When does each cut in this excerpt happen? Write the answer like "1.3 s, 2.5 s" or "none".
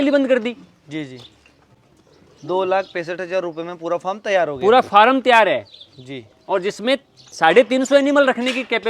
none